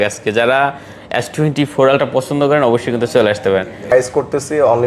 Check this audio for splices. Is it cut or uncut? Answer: cut